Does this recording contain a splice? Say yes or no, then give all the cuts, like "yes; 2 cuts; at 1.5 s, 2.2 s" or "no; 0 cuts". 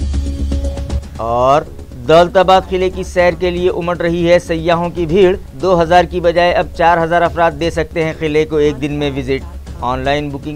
yes; 1 cut; at 1.1 s